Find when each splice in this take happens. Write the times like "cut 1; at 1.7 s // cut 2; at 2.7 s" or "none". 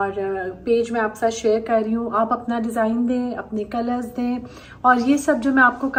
none